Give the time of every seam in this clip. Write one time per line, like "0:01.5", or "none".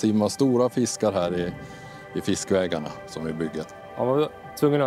0:03.8